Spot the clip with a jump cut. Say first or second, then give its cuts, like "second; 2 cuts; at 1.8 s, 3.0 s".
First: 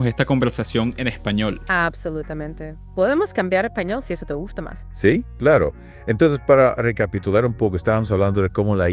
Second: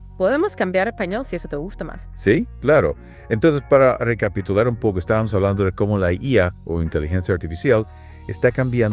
first; 1 cut; at 1.6 s